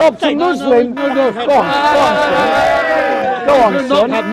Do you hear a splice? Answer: no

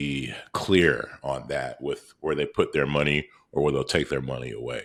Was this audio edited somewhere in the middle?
no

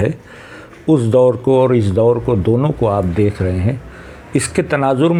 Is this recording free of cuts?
yes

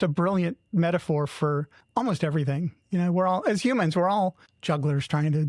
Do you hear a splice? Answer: yes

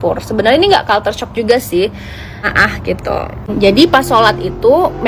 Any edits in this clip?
yes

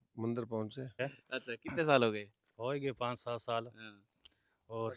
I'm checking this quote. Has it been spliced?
yes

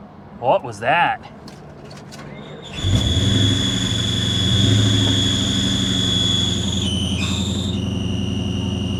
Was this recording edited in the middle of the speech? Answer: no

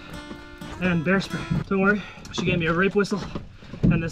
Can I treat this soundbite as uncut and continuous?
no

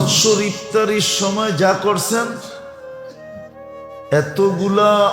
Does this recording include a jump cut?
yes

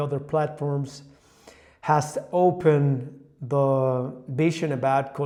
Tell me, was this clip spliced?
no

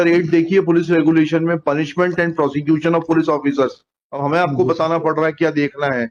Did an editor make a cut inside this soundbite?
no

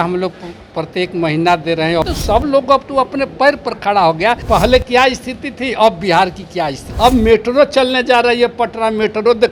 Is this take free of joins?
no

